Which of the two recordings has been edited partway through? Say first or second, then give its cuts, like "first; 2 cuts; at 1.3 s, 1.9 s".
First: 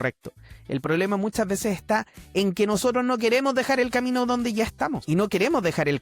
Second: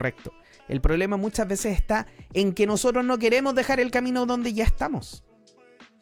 first; 1 cut; at 5.0 s